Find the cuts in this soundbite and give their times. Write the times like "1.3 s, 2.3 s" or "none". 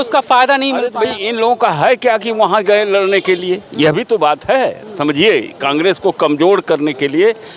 none